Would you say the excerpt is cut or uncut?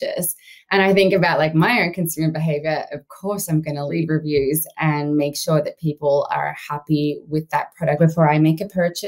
cut